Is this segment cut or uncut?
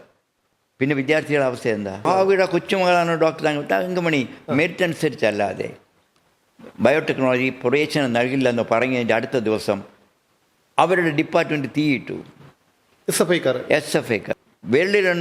cut